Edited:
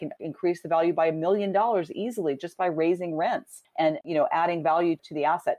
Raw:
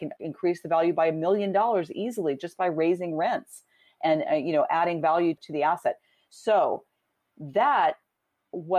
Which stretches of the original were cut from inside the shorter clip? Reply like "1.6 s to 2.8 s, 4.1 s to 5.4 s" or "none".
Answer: 4.0 s to 4.4 s